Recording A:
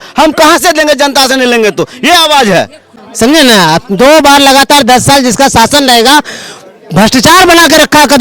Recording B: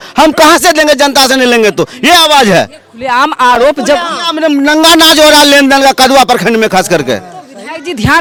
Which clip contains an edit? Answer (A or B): A